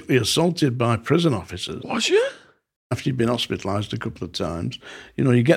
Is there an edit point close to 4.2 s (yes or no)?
no